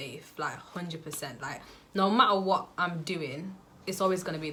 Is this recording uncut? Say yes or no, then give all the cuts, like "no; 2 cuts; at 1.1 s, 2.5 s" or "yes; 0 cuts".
yes; 0 cuts